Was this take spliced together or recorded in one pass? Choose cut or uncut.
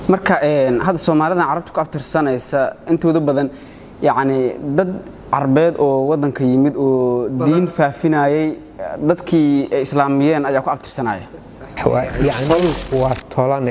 cut